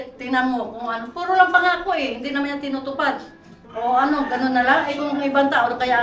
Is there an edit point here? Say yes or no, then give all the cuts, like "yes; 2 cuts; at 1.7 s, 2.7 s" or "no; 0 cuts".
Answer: no; 0 cuts